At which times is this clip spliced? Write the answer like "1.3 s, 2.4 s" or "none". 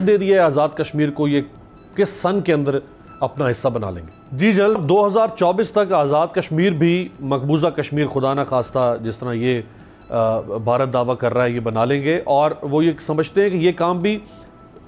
none